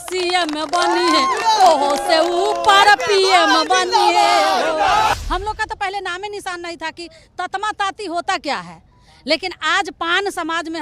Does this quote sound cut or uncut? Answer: cut